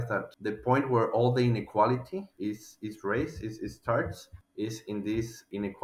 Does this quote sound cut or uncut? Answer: uncut